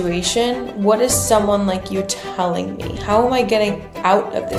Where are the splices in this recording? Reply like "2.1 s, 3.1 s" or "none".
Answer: none